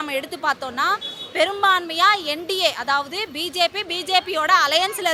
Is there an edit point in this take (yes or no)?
no